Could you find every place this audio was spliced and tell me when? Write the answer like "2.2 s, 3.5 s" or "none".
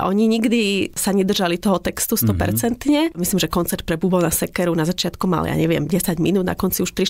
1.0 s, 3.2 s